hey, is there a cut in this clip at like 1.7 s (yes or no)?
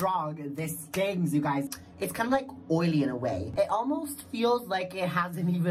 yes